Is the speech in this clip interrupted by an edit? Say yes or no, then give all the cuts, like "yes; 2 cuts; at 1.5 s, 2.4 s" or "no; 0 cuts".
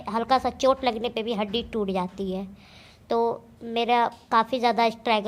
no; 0 cuts